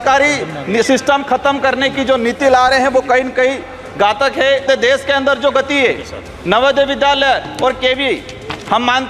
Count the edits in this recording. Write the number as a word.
one